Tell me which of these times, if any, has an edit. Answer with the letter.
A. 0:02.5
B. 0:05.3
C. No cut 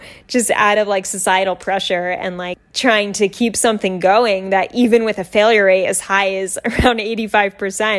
A